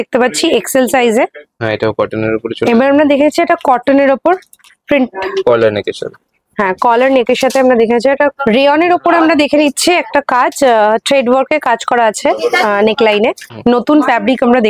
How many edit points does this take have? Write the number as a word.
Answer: three